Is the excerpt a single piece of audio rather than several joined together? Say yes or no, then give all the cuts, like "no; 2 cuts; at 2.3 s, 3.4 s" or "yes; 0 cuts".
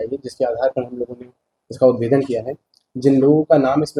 yes; 0 cuts